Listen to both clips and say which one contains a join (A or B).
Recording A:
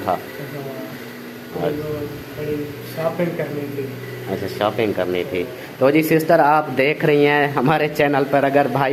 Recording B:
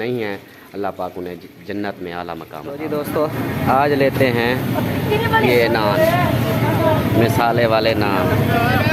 B